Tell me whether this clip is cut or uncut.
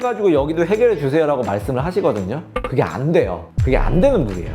uncut